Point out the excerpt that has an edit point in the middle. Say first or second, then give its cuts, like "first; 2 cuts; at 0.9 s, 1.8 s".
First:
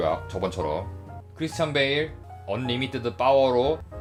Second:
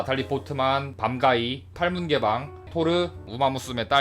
second; 3 cuts; at 0.9 s, 1.7 s, 2.7 s